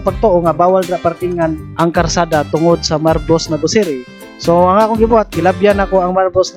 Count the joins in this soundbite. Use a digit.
0